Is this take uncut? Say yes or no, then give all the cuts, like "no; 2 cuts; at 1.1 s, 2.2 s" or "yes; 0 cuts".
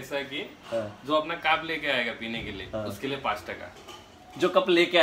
yes; 0 cuts